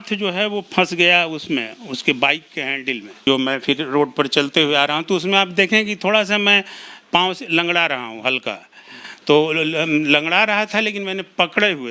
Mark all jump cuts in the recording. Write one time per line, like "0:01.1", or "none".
0:03.2